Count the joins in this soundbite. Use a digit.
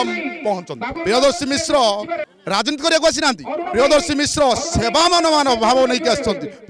2